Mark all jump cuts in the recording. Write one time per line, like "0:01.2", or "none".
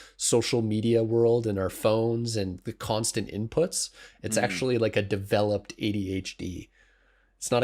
none